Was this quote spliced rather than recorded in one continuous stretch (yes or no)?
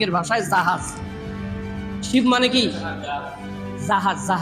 no